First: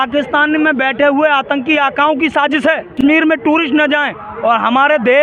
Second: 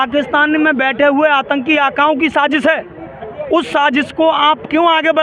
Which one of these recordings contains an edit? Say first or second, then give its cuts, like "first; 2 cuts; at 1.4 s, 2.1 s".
first; 1 cut; at 3.0 s